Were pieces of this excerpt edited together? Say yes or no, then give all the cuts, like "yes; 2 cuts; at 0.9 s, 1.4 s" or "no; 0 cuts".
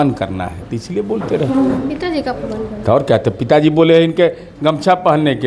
no; 0 cuts